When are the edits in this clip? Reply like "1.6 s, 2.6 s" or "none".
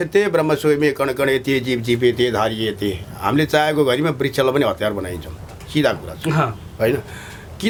none